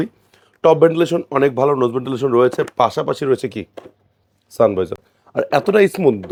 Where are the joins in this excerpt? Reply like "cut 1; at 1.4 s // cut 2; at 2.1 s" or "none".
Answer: none